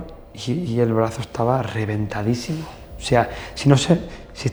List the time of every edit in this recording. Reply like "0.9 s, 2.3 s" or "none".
none